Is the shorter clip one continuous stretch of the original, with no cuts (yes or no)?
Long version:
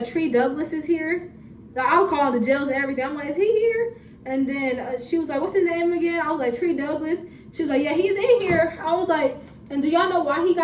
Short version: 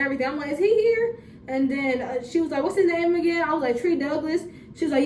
yes